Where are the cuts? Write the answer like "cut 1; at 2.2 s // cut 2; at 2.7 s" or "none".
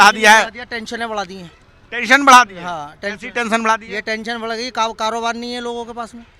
none